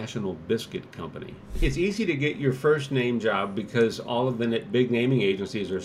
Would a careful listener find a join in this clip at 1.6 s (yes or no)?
yes